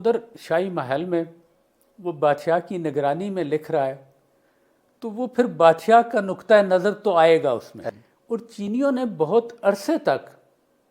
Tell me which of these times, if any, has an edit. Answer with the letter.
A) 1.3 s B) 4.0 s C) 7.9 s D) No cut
C